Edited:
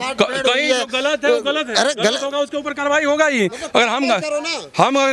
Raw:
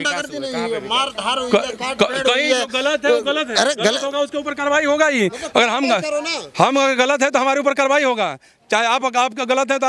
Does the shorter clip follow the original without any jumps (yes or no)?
yes